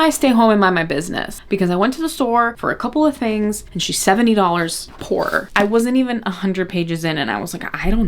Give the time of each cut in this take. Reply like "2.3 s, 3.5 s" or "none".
1.4 s, 5.4 s

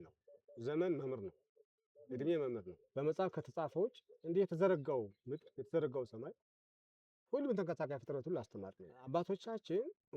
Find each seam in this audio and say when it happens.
2.8 s, 9.1 s

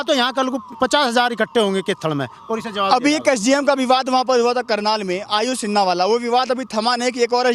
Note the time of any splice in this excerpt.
none

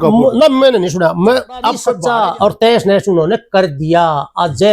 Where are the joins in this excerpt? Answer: 1.9 s

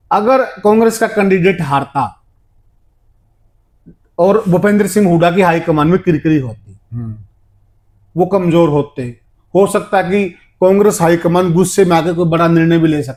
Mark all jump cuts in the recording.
none

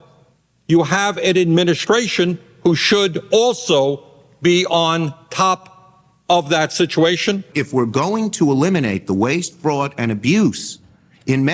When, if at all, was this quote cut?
7.4 s

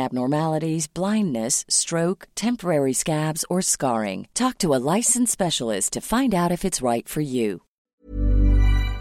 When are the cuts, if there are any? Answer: 7.9 s

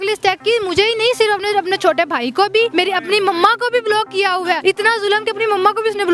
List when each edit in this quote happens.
2.7 s, 4.6 s

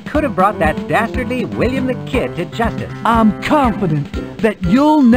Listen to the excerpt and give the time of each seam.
2.9 s

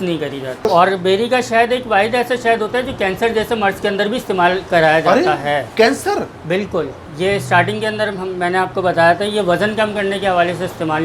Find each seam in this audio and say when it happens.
0.7 s, 7.0 s

